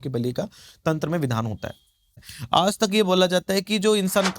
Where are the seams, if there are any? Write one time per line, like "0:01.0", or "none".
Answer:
0:02.3